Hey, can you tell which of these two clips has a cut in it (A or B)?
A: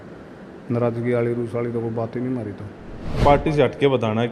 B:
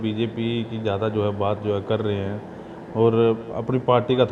A